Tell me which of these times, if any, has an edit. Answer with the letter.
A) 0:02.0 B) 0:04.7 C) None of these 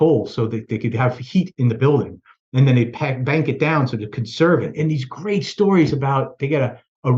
B